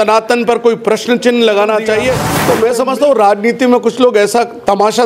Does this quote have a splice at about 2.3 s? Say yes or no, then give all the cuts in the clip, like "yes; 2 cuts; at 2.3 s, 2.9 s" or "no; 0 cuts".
yes; 1 cut; at 2.3 s